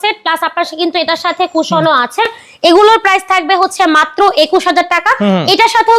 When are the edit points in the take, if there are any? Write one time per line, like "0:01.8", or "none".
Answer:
none